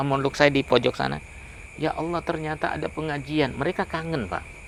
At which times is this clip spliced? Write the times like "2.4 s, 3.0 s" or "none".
none